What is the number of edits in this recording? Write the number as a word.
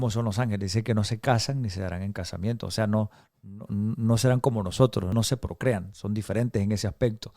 one